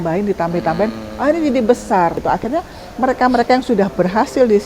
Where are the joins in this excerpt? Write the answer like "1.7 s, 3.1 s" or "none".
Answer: 2.2 s